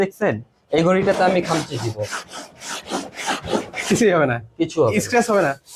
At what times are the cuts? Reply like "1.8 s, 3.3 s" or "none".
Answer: none